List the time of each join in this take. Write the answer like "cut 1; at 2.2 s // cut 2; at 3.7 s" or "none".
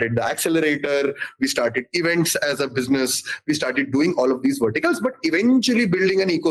none